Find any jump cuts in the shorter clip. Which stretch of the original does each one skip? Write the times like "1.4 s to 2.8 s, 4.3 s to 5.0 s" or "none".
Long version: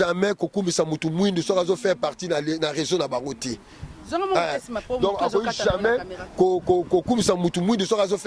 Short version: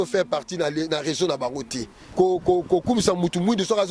3.7 s to 6.2 s